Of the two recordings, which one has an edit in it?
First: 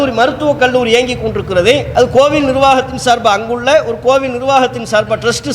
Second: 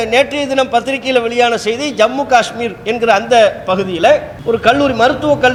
first; 1 cut; at 1.9 s

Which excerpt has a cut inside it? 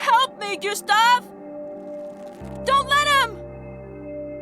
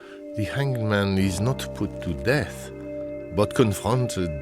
first; 1 cut; at 3.3 s

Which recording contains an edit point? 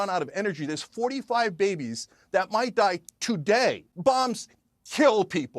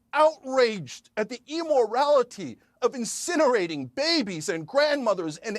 first; 1 cut; at 3.9 s

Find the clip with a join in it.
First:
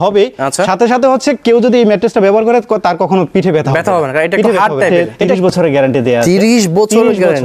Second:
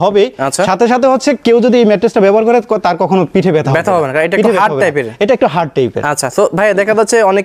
first; 1 cut; at 4.9 s

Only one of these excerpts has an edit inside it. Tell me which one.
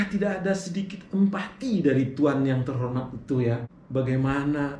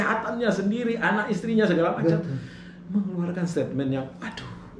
first; 1 cut; at 3.7 s

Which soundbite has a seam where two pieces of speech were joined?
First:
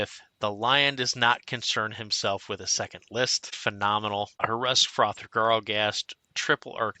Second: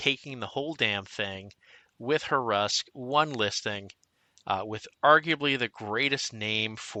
first; 2 cuts; at 3.4 s, 4.4 s

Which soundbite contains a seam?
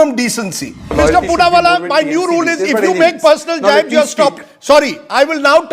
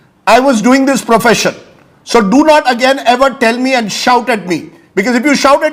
first; 1 cut; at 0.9 s

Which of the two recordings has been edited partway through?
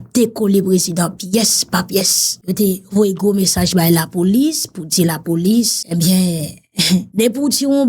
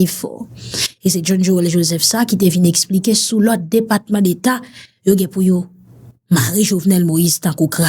first; 3 cuts; at 2.3 s, 5.8 s, 7.1 s

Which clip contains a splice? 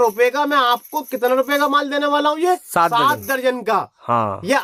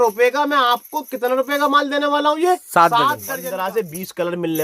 second; 1 cut; at 3.3 s

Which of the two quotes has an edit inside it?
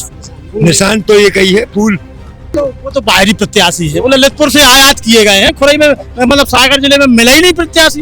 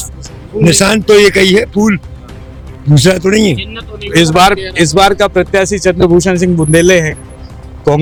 first; 1 cut; at 2.5 s

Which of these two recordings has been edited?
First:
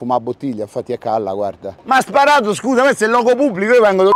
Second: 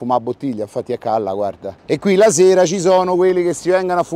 first; 1 cut; at 1.7 s

